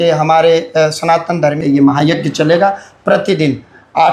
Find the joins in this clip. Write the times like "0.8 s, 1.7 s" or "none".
1.6 s

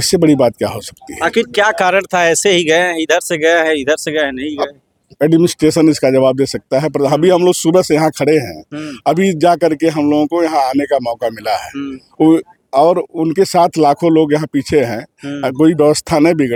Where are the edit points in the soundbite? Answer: none

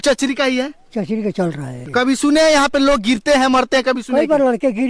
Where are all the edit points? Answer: 1.7 s

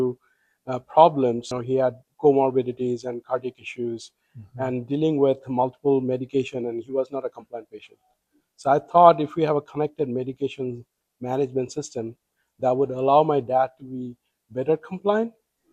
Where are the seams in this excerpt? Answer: 1.5 s

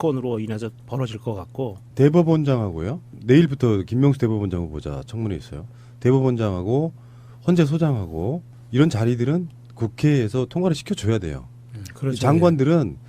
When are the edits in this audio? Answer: 7.2 s

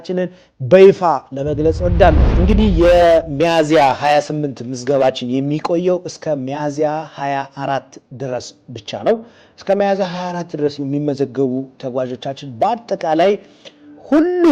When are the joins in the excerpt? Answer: 2.3 s

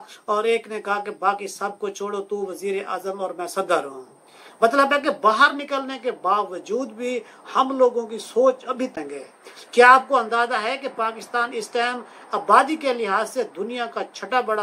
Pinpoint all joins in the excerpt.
8.9 s

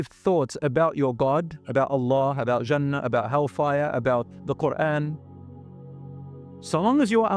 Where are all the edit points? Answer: none

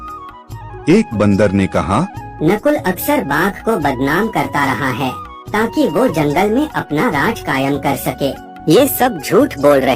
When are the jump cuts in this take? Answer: 8.5 s

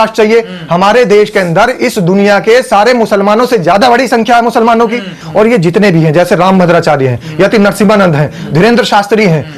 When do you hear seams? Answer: 5.2 s

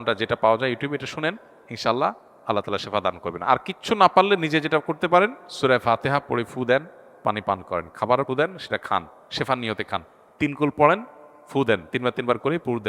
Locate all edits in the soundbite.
5.4 s, 8.3 s

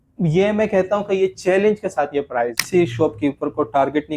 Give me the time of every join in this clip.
2.6 s

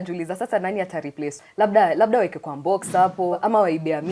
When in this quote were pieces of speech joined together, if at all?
1.3 s, 3.4 s

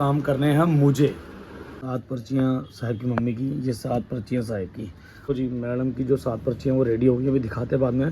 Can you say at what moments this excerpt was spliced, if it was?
1.8 s, 5.1 s

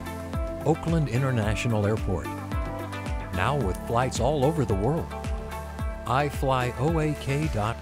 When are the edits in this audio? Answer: none

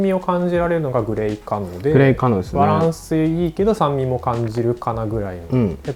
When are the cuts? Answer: none

